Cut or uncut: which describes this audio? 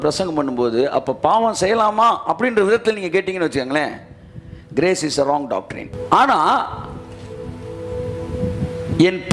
cut